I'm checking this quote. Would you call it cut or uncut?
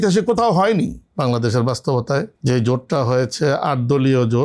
cut